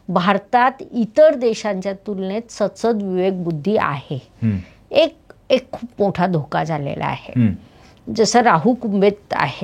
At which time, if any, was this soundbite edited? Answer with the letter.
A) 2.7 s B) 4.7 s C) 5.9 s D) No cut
D